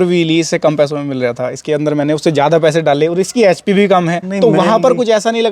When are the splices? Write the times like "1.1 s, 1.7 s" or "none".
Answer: 4.2 s